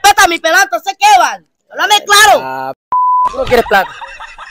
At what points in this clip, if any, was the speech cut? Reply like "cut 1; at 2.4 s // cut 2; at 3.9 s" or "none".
none